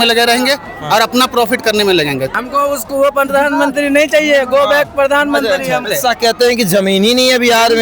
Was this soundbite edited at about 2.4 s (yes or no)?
yes